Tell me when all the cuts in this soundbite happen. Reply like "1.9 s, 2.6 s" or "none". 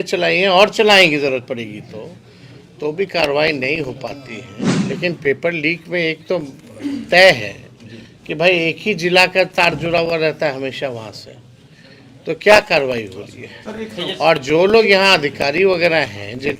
4.6 s

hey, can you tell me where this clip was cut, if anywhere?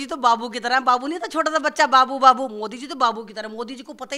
none

